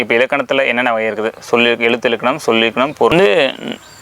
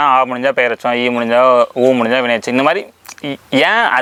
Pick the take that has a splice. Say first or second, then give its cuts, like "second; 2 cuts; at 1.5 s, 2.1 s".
first; 1 cut; at 3.1 s